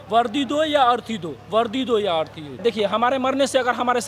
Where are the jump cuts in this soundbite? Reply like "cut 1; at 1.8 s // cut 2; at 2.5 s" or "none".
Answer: cut 1; at 2.6 s